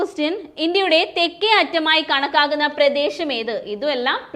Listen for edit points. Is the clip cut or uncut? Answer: uncut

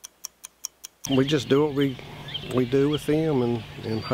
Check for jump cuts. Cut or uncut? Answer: cut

